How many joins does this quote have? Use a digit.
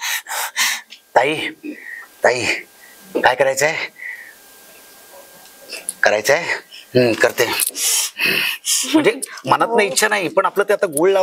0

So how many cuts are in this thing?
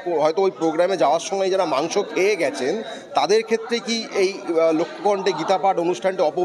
0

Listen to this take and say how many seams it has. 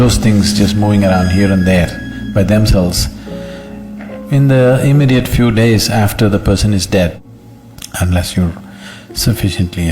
1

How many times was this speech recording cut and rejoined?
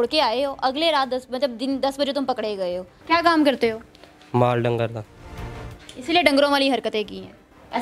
1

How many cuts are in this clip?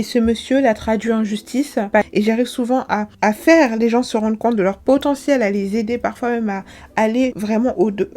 1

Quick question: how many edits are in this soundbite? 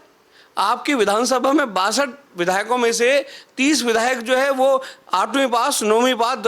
0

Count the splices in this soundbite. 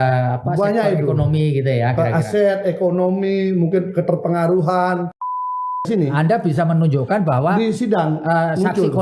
1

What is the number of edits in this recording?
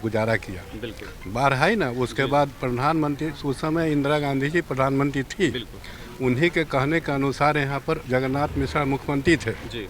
0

